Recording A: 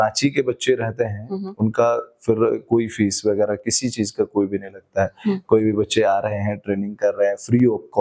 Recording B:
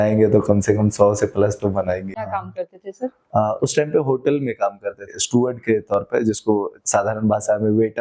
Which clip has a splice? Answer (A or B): B